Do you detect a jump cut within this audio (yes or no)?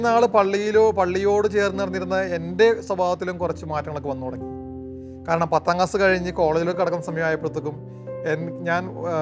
no